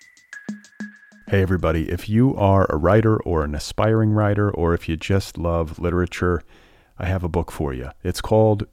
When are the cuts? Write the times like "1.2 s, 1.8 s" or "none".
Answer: 1.0 s